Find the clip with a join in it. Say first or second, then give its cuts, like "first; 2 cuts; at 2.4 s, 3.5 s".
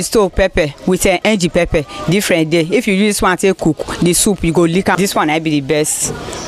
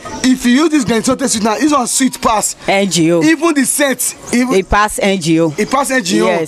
first; 1 cut; at 5.0 s